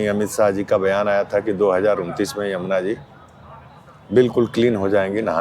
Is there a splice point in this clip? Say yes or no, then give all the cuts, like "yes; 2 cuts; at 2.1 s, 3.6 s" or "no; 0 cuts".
no; 0 cuts